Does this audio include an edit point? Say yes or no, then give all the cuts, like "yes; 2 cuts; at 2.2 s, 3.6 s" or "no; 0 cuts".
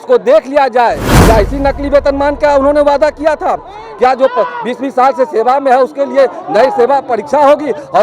yes; 1 cut; at 1.1 s